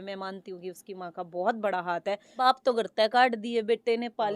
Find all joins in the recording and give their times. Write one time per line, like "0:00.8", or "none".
0:02.4